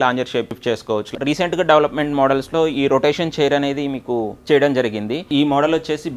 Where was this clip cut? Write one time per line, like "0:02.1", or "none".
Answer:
0:01.1
0:05.3